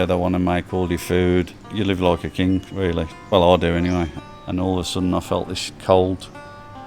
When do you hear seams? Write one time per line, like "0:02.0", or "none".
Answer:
0:01.7
0:03.3
0:04.2